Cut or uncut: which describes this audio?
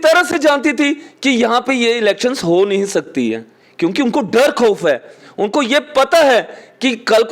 uncut